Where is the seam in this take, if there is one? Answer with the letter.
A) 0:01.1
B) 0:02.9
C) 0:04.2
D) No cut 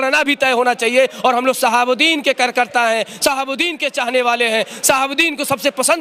D